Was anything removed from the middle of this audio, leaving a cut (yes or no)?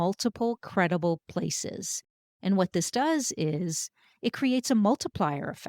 yes